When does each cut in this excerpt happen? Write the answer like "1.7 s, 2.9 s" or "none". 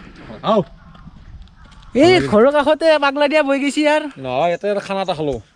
none